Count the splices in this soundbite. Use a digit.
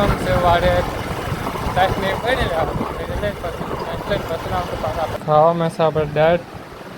1